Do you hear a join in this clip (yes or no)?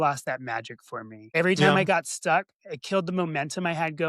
yes